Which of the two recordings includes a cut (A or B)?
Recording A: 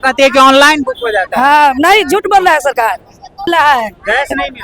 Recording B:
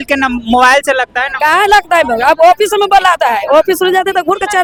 A